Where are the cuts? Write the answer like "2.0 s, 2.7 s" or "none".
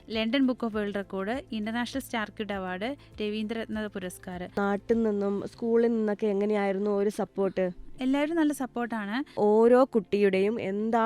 4.6 s, 9.4 s